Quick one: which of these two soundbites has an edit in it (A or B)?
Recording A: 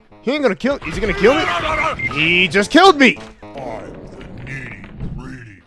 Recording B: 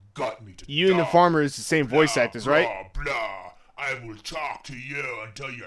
A